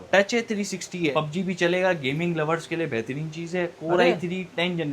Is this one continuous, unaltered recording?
no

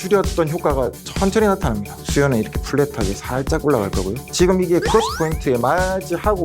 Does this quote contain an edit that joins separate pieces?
yes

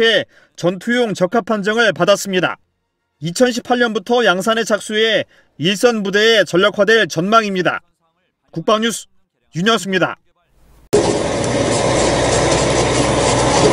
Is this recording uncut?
yes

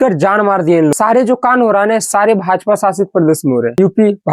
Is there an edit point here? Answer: yes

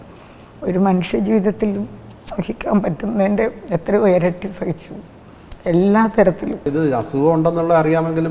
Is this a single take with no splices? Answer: no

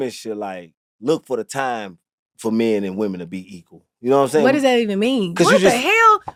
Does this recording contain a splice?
no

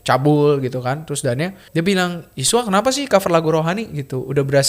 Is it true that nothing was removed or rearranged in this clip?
no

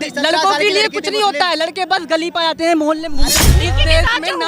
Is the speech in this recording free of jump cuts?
no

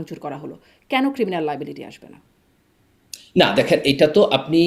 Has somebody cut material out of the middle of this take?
no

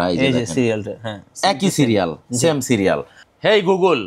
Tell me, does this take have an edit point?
yes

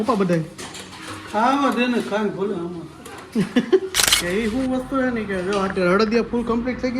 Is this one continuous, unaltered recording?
no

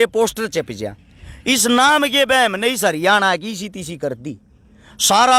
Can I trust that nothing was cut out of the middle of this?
yes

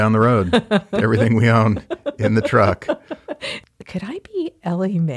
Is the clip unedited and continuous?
yes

